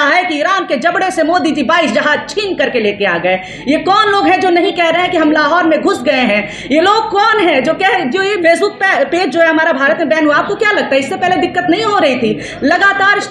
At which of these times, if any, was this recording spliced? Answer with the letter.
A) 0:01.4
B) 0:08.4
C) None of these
B